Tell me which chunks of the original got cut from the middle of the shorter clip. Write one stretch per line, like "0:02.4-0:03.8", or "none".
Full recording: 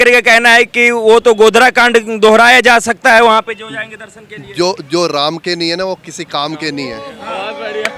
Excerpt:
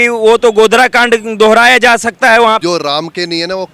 0:03.4-0:04.9

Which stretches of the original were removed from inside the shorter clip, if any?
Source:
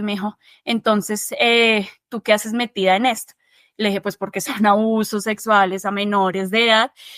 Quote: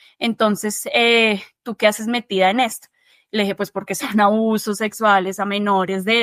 none

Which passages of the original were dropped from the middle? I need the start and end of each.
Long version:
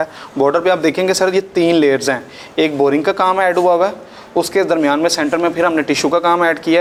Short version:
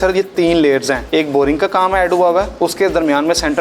0:02.2-0:02.4
0:04.0-0:04.3

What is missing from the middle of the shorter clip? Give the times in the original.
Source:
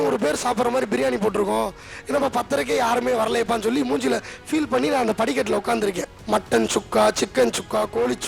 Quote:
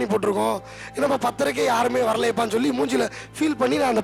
none

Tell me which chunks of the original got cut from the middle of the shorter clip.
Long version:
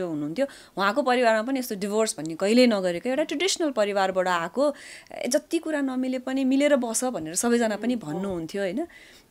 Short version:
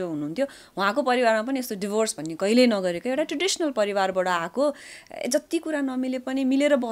none

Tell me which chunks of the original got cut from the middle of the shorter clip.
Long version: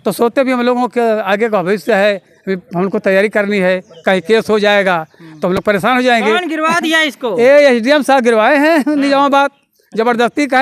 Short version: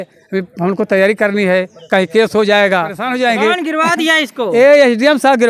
0:05.2-0:05.9

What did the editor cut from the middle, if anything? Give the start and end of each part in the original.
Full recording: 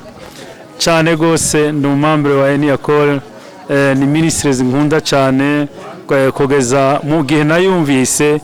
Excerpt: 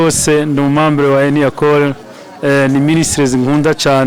none

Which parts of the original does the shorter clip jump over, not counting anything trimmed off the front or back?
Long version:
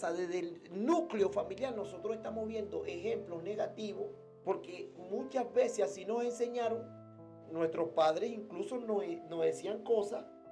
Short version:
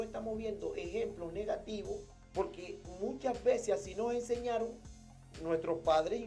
none

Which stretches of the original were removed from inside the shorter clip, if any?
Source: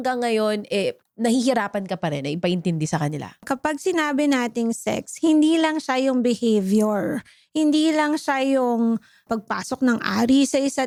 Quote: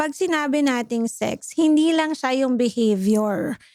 none

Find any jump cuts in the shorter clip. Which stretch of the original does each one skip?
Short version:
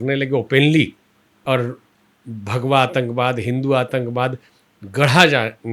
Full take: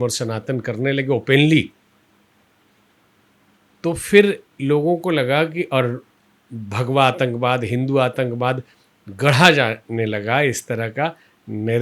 0:02.2-0:05.7

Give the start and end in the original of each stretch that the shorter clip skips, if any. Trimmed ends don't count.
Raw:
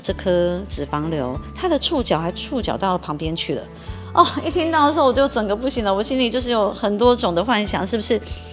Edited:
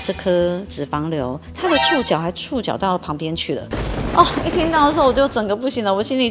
none

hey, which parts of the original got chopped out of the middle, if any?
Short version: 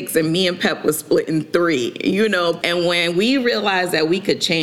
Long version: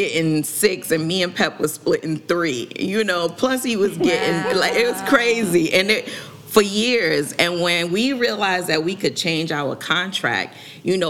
0:03.3-0:07.3

